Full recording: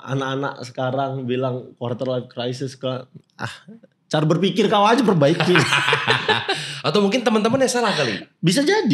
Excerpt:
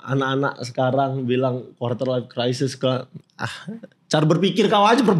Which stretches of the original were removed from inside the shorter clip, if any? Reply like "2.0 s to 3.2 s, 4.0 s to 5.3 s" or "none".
none